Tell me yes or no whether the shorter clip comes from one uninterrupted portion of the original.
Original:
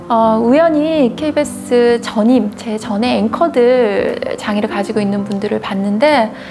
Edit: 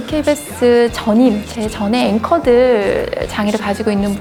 yes